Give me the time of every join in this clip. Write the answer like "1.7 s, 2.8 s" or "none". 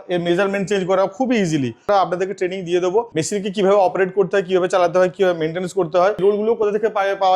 1.8 s, 3.1 s, 6.2 s